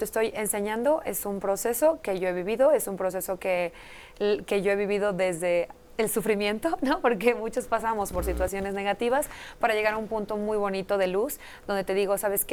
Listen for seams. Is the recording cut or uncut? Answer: uncut